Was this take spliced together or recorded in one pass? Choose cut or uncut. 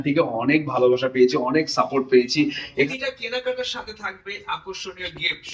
cut